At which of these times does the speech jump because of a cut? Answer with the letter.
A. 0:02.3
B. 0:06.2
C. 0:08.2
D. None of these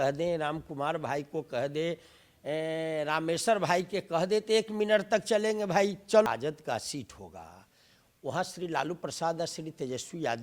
B